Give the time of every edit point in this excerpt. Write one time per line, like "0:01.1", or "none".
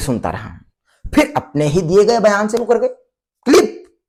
none